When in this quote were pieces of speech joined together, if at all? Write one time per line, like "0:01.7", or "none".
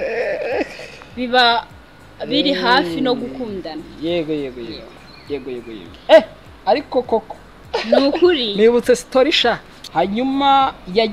0:09.8